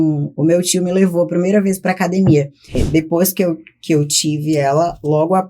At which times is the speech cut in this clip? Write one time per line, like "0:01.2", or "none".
0:02.8